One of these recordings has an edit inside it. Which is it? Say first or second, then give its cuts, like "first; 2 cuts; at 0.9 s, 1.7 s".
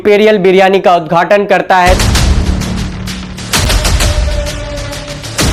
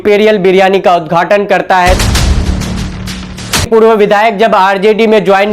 second; 1 cut; at 3.9 s